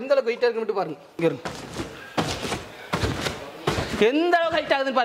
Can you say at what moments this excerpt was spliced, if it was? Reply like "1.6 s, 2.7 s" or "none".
1.1 s